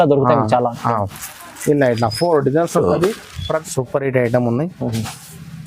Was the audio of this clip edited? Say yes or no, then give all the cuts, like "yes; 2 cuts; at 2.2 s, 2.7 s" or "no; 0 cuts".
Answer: yes; 1 cut; at 3.6 s